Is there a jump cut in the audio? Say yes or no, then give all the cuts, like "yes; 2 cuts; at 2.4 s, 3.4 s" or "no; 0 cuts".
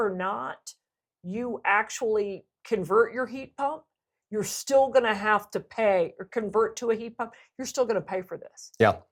no; 0 cuts